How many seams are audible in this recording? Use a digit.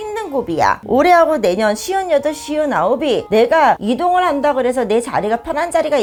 0